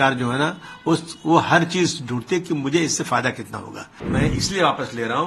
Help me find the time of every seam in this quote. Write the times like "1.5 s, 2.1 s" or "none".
3.9 s